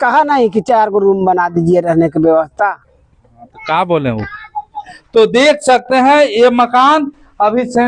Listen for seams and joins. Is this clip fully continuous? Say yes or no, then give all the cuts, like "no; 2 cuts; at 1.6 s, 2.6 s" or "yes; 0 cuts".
no; 1 cut; at 4.9 s